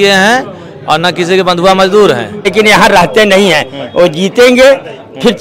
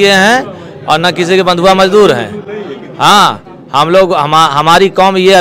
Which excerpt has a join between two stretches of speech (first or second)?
first